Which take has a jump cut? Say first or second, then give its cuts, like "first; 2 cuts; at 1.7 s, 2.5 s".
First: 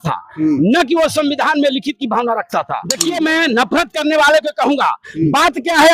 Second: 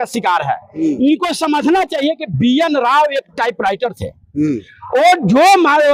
first; 1 cut; at 3.0 s